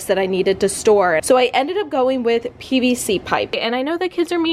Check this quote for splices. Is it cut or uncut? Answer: cut